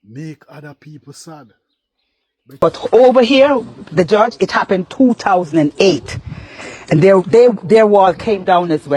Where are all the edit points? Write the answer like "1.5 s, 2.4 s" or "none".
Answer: 2.5 s